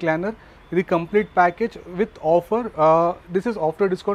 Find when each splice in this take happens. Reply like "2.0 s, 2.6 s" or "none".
none

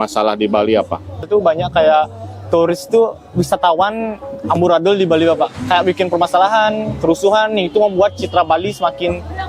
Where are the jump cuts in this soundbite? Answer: 1.3 s

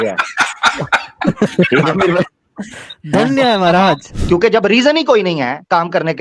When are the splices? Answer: 4.1 s

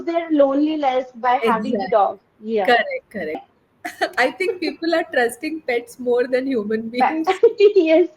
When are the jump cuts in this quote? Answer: 3.4 s

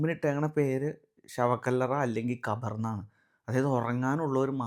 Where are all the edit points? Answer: none

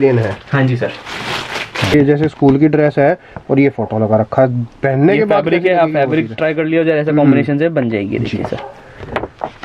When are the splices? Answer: 1.9 s

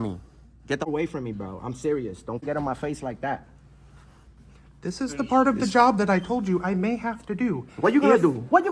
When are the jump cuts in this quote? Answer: 0.9 s, 2.4 s

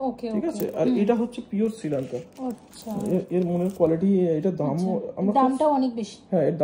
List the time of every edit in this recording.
none

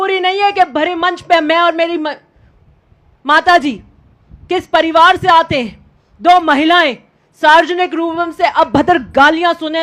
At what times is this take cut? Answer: none

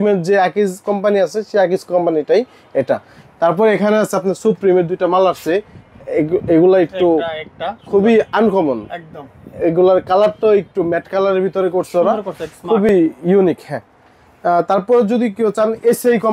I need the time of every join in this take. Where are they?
none

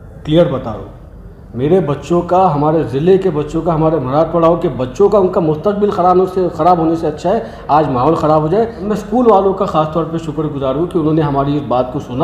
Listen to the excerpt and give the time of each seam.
8.8 s

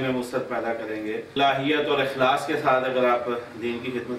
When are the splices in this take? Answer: 1.3 s

